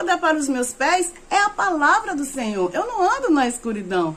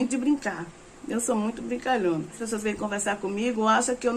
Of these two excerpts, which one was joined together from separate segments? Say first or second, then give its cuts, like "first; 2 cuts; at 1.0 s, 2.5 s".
second; 1 cut; at 2.4 s